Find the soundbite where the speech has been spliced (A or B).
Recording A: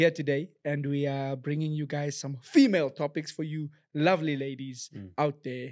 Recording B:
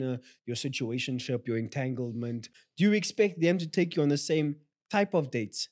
B